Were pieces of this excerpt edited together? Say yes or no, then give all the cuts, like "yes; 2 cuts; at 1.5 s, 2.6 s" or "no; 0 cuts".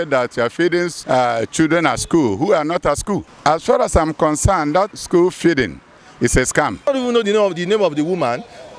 yes; 4 cuts; at 1.0 s, 3.3 s, 4.9 s, 6.9 s